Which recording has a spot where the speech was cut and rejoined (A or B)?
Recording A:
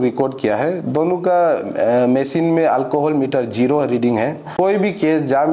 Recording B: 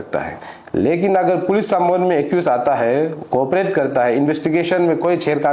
A